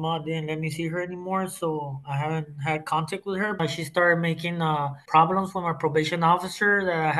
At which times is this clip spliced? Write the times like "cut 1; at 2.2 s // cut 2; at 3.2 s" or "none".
cut 1; at 3.6 s // cut 2; at 5.0 s